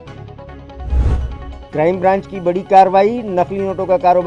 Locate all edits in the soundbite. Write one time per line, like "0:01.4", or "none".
0:01.5